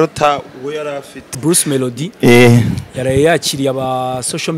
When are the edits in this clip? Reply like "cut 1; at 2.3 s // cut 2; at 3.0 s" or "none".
cut 1; at 1.3 s